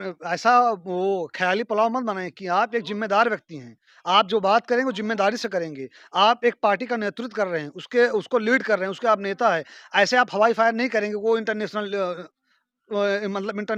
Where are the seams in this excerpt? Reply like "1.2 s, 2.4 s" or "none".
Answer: none